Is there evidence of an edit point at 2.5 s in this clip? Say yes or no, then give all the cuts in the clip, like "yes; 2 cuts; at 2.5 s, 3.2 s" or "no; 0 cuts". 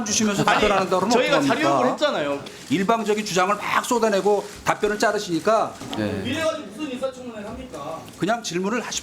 yes; 2 cuts; at 2.5 s, 5.8 s